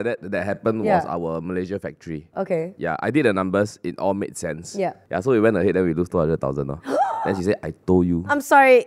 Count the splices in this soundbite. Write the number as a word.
one